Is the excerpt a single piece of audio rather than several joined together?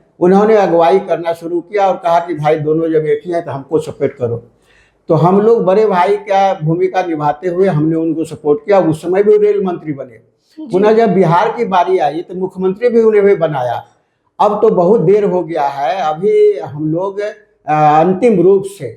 yes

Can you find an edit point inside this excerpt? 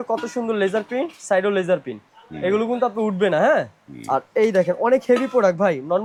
no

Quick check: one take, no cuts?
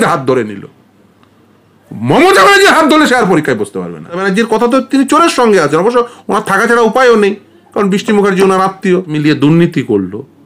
no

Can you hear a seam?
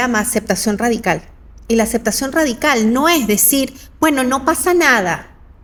no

